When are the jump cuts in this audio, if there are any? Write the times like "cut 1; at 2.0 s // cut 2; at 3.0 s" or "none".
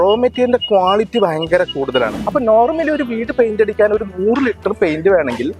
cut 1; at 2.2 s